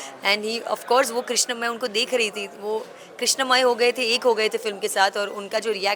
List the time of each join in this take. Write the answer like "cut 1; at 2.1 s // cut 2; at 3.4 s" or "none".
none